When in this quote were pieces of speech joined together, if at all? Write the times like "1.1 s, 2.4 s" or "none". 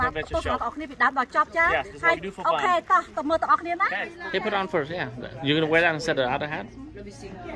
4.2 s

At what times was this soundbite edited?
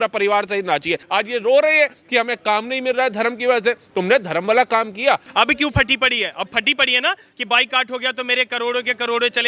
1.0 s, 5.3 s

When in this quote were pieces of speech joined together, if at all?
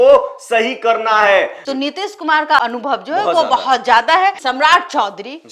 1.6 s, 4.4 s

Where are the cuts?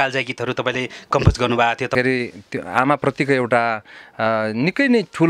1.9 s

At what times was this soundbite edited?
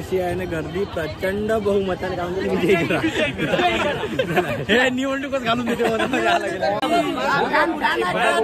6.8 s

